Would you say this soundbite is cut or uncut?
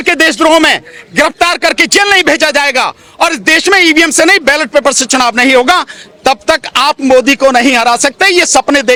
uncut